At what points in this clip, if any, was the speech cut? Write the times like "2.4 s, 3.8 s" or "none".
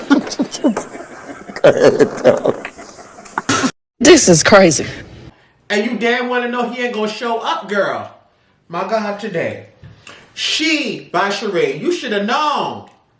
none